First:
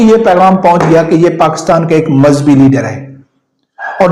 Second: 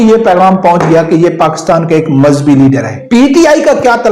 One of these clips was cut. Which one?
second; 1 cut; at 3.0 s

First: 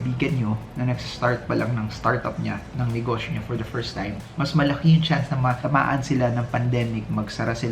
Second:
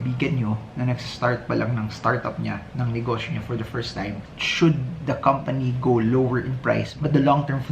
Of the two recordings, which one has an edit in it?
second; 1 cut; at 4.2 s

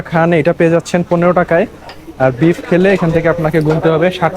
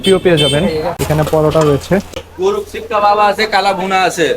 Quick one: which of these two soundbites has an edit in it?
second; 2 cuts; at 1.0 s, 2.2 s

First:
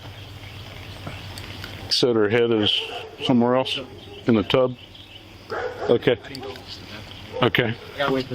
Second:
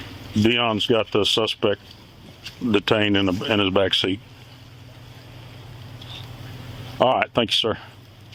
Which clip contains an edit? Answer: first; 1 cut; at 1.9 s

